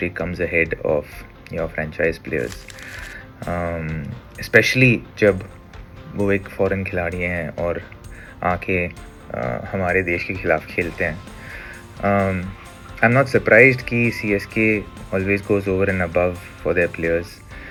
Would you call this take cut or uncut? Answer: uncut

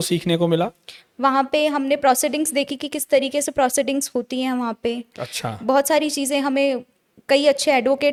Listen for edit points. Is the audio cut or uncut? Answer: uncut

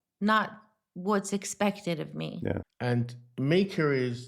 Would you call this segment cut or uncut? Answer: cut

